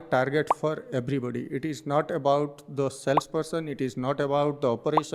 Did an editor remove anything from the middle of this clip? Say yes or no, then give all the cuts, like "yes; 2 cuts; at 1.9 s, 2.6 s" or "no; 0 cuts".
no; 0 cuts